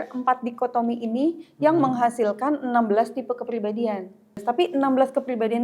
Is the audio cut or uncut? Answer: cut